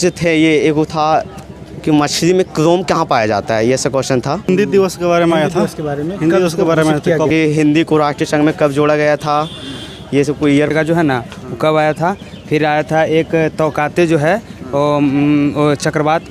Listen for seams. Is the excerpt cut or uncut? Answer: cut